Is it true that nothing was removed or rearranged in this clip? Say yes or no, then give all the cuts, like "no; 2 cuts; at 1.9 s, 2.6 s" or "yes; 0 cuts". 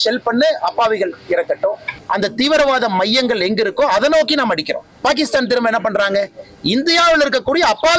no; 1 cut; at 1.9 s